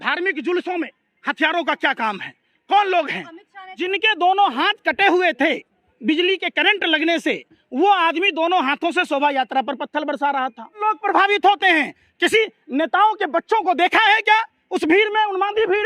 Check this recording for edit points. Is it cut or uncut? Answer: cut